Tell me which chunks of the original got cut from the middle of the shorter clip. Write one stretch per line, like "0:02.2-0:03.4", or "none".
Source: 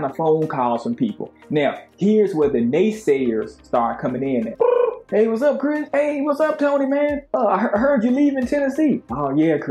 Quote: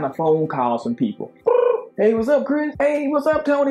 0:01.4-0:04.5